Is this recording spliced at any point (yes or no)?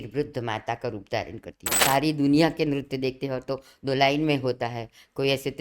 yes